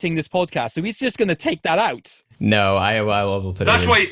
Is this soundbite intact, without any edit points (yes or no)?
yes